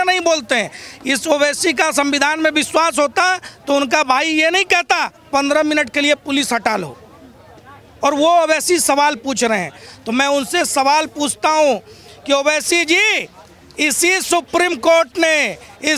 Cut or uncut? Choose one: uncut